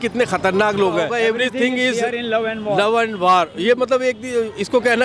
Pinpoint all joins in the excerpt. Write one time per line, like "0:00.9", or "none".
0:01.1